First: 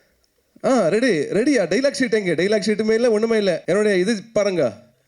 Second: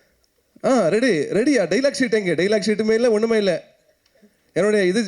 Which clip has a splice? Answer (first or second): first